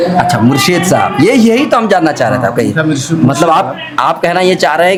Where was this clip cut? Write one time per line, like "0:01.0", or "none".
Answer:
none